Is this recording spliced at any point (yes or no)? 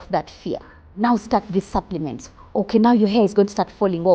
yes